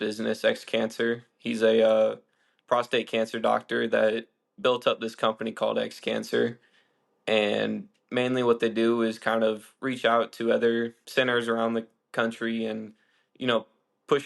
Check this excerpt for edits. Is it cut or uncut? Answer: cut